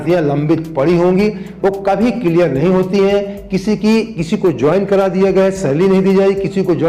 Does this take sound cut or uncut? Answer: uncut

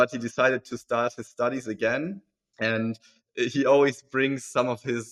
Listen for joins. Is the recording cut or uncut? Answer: uncut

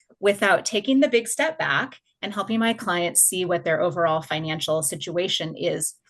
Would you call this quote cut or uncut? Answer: uncut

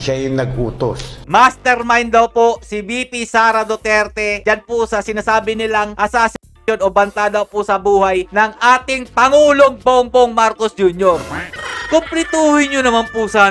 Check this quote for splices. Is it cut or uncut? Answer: uncut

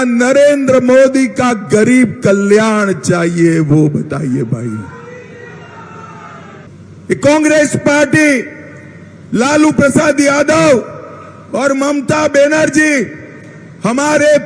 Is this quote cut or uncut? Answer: uncut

